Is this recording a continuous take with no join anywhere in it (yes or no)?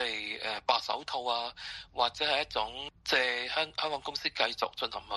no